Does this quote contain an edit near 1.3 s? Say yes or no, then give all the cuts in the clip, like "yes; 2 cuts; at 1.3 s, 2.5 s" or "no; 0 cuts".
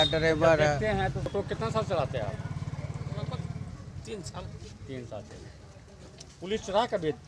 yes; 1 cut; at 1.3 s